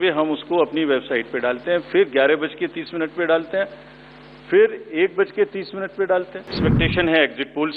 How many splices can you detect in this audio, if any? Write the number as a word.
one